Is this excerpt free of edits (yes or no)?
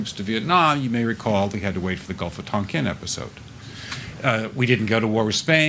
no